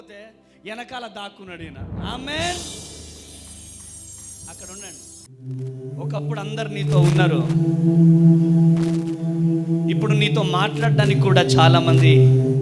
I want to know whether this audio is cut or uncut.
cut